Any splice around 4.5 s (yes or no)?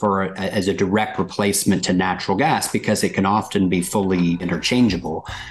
yes